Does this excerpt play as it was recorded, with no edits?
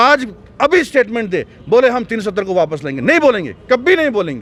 yes; 0 cuts

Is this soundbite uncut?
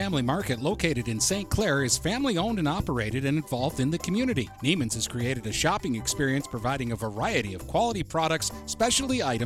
yes; 0 cuts

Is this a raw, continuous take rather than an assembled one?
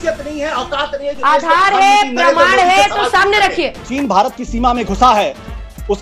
no; 1 cut; at 3.9 s

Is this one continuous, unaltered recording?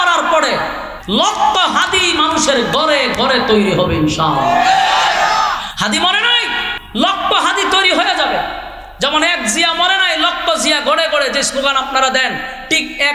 no; 1 cut; at 1.0 s

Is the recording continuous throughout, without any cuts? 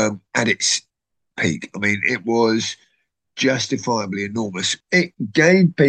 no; 1 cut; at 4.7 s

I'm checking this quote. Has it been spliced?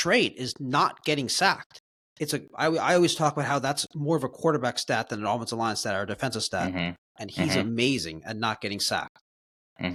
no; 0 cuts

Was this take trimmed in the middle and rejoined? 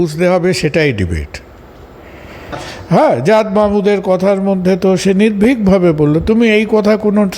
yes; 1 cut; at 2.7 s

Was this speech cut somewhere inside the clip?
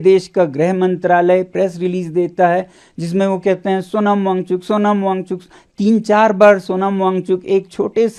no; 0 cuts

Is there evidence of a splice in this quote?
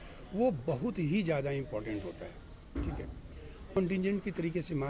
yes; 1 cut; at 3.8 s

